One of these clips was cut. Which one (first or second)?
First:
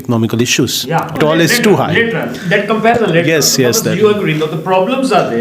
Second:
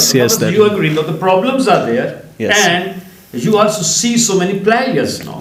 first